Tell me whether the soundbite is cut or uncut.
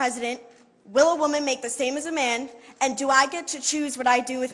uncut